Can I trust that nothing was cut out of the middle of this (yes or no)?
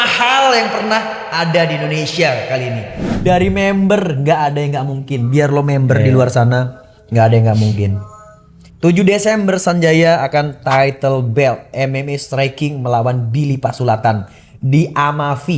no